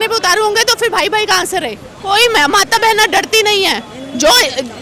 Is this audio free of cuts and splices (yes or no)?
no